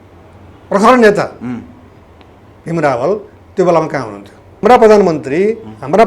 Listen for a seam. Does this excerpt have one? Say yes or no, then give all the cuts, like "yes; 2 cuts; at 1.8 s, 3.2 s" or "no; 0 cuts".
yes; 1 cut; at 4.5 s